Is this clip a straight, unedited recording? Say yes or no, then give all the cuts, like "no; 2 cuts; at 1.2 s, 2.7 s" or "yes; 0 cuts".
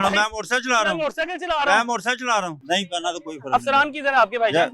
no; 1 cut; at 2.6 s